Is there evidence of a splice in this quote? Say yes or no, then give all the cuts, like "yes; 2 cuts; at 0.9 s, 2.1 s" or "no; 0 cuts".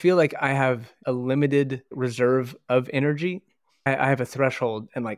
yes; 1 cut; at 1.0 s